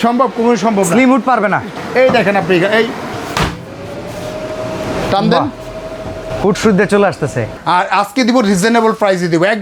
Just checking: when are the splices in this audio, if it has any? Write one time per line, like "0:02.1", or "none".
0:01.7
0:03.2
0:06.3
0:07.5